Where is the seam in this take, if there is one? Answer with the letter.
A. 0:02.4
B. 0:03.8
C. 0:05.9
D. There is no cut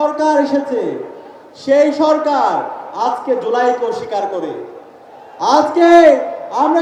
D